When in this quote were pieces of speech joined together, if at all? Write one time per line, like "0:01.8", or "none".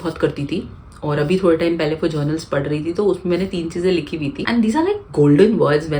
none